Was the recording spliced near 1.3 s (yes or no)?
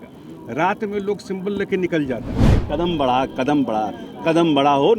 no